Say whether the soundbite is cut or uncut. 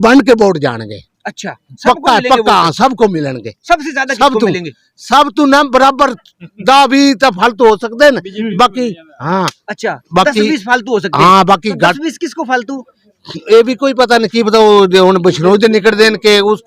uncut